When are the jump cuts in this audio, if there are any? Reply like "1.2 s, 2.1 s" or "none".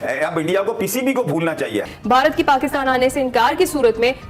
1.9 s